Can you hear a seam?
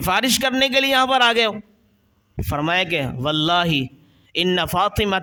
no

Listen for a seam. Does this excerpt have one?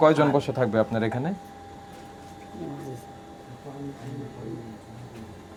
no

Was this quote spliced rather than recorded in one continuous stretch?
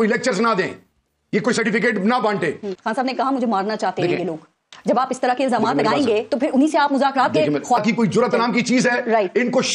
yes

